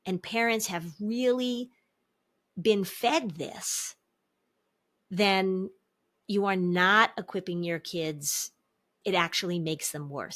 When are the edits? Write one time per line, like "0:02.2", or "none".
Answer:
0:09.0